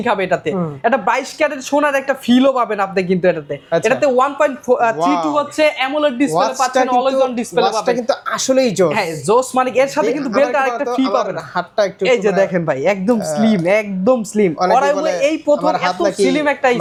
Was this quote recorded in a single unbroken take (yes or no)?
yes